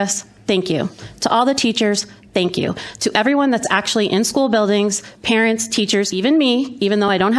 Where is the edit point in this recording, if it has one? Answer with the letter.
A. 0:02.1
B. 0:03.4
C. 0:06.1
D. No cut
C